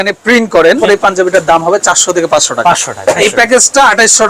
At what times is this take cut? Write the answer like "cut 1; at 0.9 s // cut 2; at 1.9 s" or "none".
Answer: cut 1; at 0.8 s // cut 2; at 3.2 s